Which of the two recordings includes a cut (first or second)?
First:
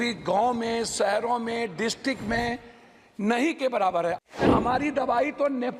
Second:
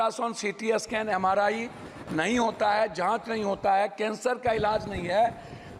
first